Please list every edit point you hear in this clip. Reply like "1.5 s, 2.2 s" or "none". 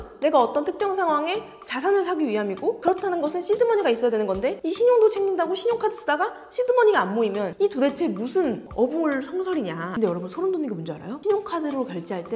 9.9 s